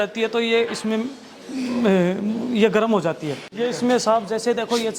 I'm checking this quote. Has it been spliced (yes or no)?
yes